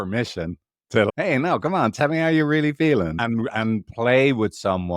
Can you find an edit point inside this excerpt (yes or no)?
yes